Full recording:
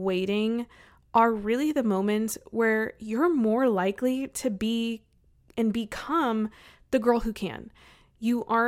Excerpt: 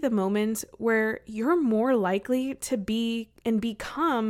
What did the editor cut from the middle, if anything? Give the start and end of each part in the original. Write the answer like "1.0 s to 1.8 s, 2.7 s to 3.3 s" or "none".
5.0 s to 5.4 s